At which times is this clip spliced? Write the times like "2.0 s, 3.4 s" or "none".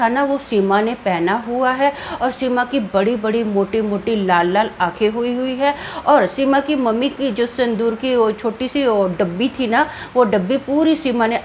none

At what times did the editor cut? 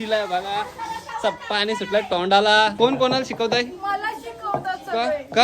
2.7 s

